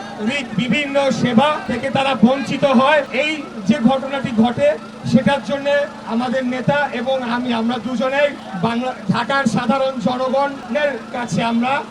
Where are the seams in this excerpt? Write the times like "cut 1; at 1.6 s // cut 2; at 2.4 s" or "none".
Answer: cut 1; at 1.7 s // cut 2; at 3.1 s // cut 3; at 8.5 s // cut 4; at 10.6 s